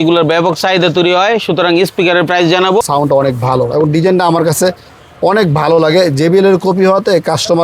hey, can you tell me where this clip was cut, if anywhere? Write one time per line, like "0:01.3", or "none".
0:02.8